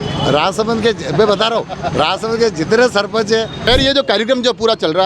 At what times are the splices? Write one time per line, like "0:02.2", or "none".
0:03.7